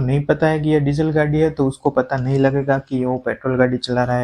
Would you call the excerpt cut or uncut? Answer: uncut